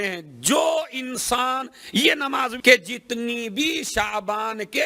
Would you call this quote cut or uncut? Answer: cut